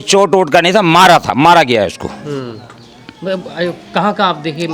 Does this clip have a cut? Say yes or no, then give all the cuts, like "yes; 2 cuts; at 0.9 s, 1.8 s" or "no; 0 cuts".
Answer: no; 0 cuts